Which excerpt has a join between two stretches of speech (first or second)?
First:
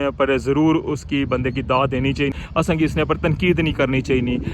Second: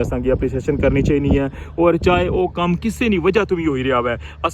first